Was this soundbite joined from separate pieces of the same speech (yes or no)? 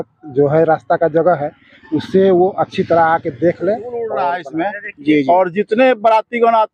yes